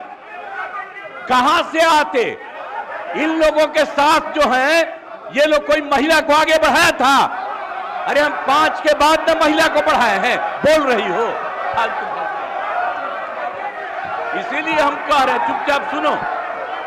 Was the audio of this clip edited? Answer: no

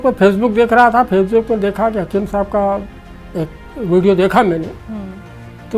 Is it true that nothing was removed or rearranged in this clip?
yes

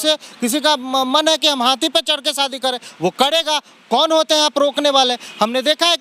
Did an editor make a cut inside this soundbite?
no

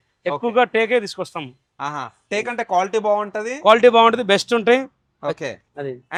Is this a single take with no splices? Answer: yes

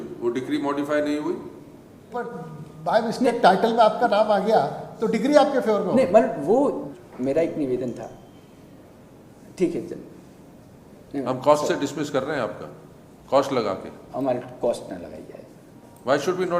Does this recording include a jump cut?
yes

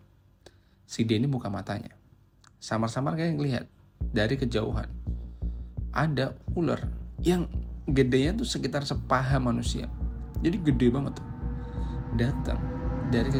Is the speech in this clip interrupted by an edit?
no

